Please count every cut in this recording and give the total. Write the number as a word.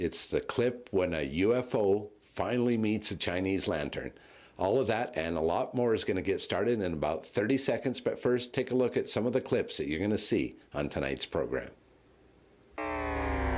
zero